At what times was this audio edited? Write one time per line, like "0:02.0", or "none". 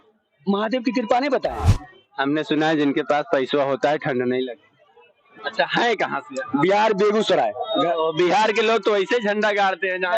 0:01.7
0:05.2